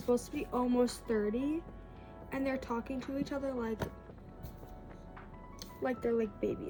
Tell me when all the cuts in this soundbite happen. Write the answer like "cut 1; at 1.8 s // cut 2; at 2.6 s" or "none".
none